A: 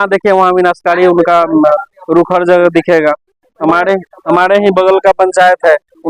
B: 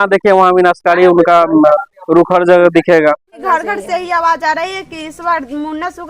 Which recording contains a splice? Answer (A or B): B